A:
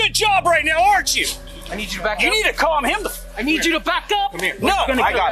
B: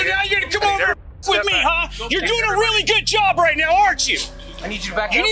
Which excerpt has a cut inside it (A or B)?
A